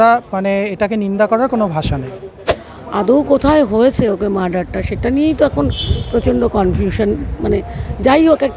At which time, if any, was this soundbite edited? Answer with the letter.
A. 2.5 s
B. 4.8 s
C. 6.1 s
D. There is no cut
A